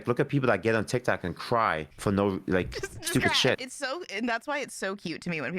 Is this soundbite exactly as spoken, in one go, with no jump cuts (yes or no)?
no